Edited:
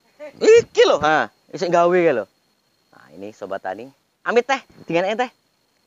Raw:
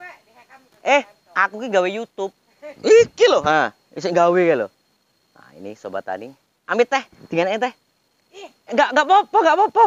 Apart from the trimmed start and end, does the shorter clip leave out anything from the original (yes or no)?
no